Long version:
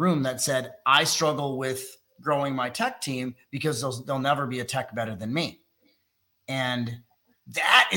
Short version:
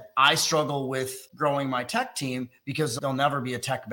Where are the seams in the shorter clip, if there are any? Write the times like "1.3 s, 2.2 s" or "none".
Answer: 1.2 s, 2.9 s